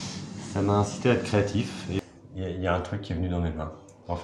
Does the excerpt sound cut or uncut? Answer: cut